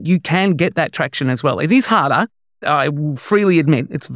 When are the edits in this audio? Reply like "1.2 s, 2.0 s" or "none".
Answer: 2.6 s